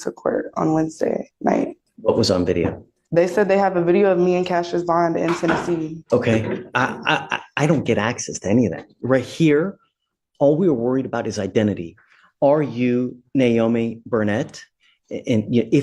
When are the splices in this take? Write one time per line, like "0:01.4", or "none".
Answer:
0:01.9
0:06.0